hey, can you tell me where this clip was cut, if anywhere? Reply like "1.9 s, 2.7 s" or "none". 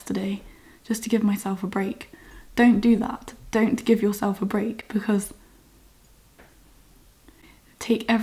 none